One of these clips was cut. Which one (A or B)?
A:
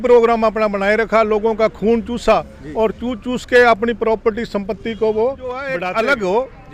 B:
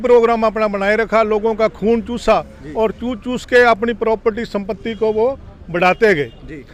A